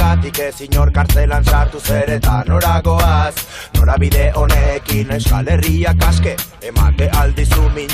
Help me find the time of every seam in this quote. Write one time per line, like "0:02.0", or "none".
0:01.4